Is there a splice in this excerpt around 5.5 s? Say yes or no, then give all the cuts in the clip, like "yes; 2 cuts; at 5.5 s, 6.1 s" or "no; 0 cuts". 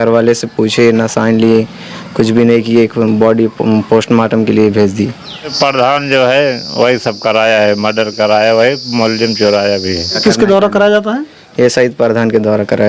yes; 2 cuts; at 5.5 s, 10.2 s